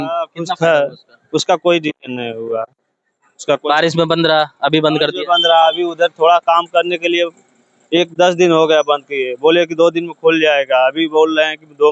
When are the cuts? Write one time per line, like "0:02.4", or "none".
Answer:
none